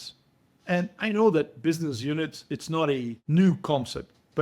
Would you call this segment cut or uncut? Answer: cut